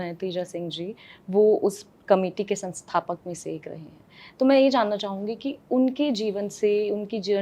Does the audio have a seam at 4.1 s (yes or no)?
no